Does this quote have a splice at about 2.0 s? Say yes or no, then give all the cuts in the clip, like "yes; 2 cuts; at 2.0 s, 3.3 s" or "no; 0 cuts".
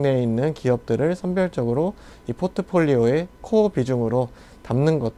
no; 0 cuts